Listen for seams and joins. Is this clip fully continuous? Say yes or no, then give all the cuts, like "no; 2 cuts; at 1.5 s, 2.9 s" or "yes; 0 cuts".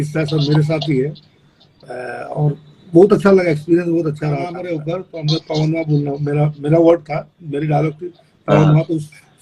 no; 1 cut; at 4.6 s